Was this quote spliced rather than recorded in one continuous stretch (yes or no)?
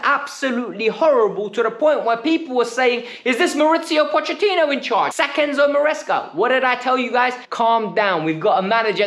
yes